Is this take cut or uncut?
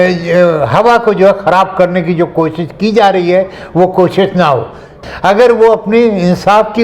cut